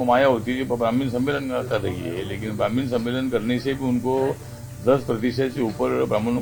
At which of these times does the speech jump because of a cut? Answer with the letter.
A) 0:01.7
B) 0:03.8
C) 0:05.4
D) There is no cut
D